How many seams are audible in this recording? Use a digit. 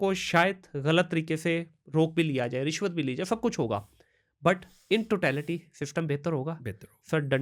0